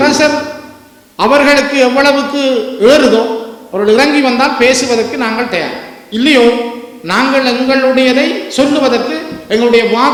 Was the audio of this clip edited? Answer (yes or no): no